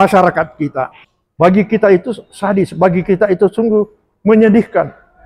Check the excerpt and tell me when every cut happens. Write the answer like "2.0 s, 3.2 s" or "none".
0.9 s

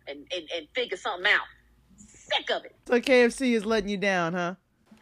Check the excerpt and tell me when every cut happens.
2.7 s

